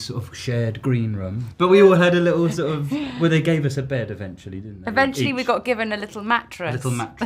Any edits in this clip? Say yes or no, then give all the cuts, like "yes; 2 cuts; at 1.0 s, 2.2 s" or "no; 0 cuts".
yes; 1 cut; at 1.4 s